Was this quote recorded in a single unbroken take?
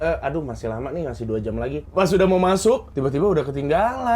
no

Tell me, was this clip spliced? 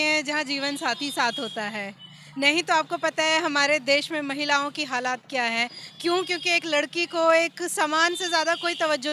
no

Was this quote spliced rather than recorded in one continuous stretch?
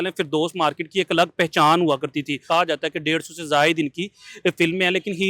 yes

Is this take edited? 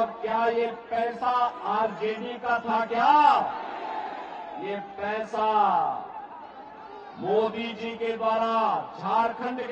no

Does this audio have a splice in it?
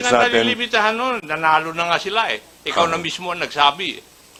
no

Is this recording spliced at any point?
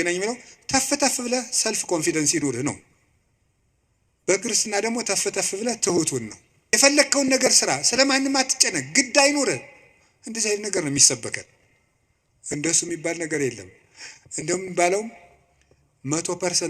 yes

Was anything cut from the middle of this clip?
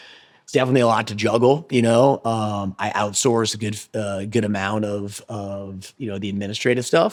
no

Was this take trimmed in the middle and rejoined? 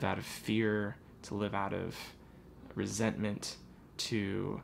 no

